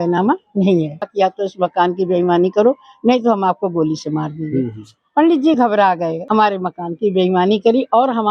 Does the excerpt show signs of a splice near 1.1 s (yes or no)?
yes